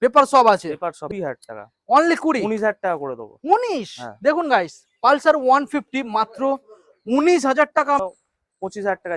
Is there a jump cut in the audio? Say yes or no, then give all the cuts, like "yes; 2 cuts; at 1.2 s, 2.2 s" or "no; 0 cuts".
yes; 2 cuts; at 1.0 s, 8.0 s